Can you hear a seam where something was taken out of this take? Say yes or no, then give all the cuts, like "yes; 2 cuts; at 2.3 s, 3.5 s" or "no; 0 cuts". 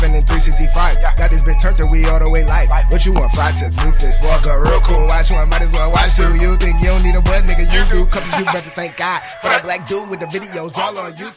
no; 0 cuts